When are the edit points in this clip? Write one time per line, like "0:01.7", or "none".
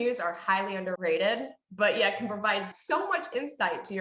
0:01.0
0:02.7